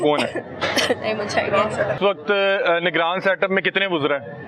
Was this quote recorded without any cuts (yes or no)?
no